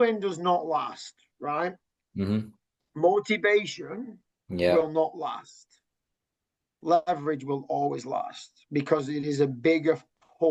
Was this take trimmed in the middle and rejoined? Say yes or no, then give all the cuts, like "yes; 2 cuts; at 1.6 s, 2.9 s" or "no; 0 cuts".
no; 0 cuts